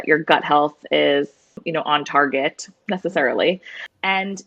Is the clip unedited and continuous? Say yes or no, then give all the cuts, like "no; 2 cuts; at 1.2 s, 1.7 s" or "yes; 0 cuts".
no; 1 cut; at 2.7 s